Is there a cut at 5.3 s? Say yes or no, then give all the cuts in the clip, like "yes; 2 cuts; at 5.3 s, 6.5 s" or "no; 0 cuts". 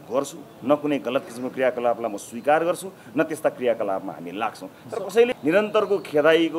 yes; 1 cut; at 5.3 s